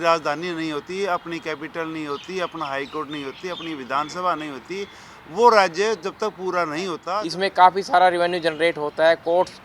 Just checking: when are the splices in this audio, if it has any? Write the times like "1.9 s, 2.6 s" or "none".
7.0 s